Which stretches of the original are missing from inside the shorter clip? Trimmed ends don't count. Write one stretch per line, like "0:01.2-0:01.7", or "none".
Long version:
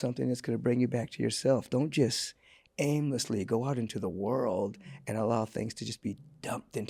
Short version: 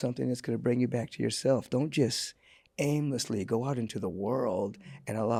none